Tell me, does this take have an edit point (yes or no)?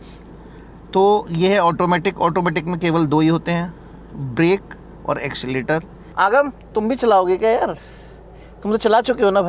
yes